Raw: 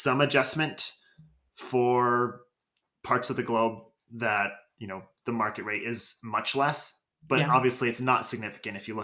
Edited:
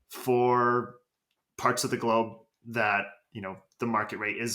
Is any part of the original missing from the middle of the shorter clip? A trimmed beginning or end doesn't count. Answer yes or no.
no